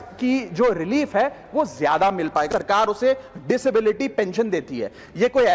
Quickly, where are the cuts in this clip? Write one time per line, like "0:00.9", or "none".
0:02.5